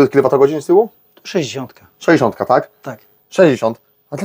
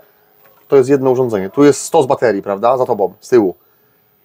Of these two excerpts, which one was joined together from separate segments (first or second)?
first